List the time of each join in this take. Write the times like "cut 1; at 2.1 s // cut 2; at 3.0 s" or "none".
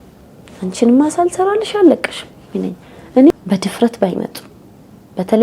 cut 1; at 3.3 s